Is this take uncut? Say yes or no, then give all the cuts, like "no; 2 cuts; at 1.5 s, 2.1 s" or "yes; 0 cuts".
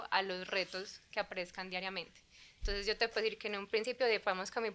yes; 0 cuts